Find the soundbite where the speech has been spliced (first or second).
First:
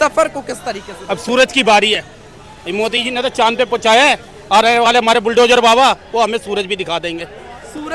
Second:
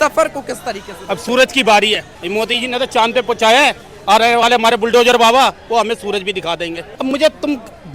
second